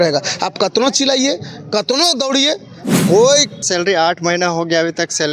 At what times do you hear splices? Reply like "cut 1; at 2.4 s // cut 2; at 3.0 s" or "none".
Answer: cut 1; at 3.7 s